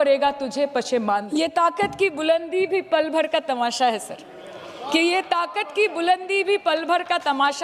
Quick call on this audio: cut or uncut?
cut